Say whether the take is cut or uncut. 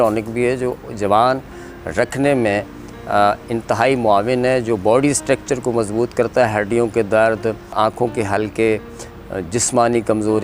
cut